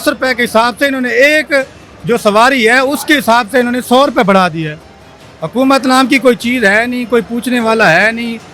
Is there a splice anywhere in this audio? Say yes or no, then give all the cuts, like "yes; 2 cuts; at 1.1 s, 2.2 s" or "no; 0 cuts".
no; 0 cuts